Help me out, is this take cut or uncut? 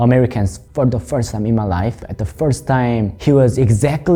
uncut